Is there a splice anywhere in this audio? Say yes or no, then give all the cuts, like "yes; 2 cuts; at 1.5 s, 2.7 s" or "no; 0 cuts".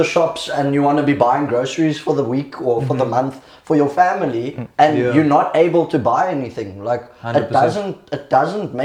no; 0 cuts